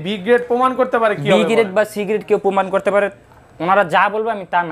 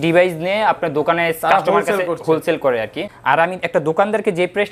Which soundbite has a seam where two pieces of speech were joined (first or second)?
second